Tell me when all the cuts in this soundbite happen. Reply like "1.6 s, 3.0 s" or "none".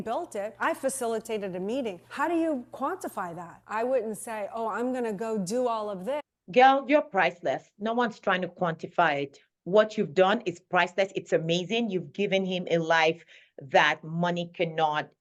none